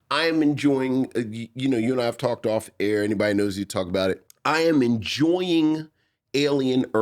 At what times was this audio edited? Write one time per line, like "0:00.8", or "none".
0:04.3